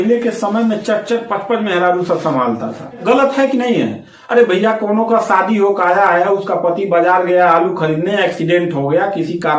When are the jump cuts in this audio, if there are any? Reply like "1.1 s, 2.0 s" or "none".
3.0 s